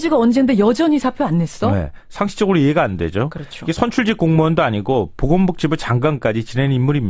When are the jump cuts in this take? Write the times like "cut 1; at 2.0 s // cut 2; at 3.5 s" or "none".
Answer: cut 1; at 0.9 s